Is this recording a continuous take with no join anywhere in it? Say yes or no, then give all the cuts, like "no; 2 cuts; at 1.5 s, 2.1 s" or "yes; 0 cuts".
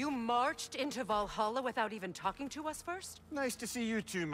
yes; 0 cuts